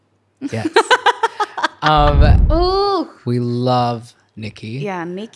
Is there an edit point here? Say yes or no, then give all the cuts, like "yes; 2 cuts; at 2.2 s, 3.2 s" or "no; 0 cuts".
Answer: yes; 1 cut; at 2.4 s